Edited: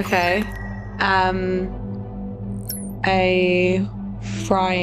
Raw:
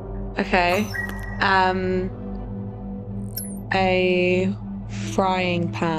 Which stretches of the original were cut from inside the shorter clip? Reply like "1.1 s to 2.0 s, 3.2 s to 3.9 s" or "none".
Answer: 2.1 s to 2.4 s